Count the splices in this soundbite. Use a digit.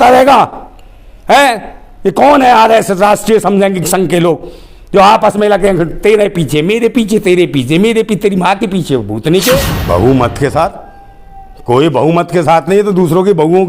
1